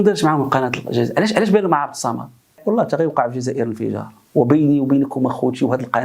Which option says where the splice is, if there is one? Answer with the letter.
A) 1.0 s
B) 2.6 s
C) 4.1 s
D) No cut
B